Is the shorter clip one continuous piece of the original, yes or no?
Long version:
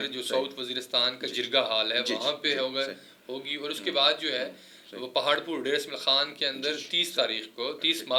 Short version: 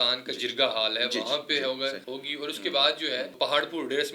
no